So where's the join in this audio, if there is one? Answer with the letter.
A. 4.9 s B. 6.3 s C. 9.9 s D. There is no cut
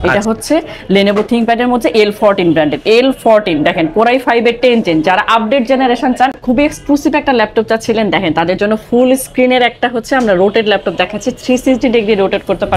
B